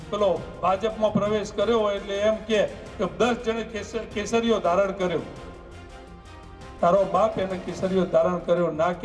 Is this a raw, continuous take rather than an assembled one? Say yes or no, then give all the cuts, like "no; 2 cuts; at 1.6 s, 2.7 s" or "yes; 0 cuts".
yes; 0 cuts